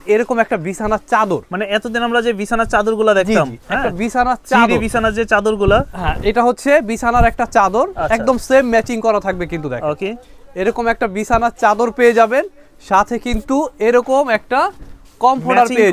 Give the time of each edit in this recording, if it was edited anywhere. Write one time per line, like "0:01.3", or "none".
none